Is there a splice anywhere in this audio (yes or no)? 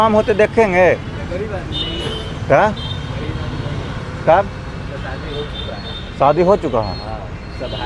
no